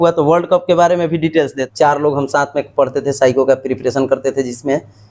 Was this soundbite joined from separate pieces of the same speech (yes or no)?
yes